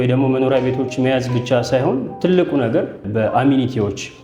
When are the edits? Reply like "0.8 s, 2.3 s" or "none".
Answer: 3.0 s